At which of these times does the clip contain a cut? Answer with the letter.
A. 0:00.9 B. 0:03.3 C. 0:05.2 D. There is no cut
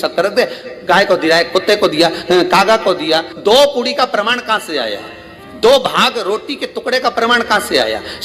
B